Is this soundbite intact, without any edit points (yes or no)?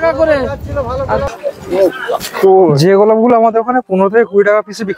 no